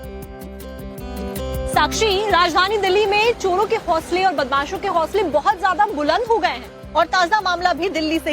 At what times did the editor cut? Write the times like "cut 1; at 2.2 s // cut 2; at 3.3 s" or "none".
cut 1; at 4.7 s